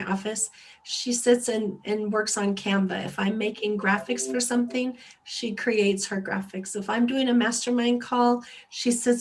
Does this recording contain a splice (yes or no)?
no